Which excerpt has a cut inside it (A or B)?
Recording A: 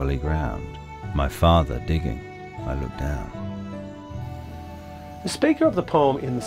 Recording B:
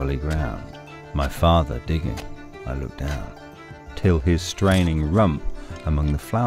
B